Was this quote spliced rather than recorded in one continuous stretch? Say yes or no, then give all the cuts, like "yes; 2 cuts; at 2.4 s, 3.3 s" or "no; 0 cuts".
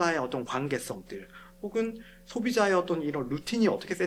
no; 0 cuts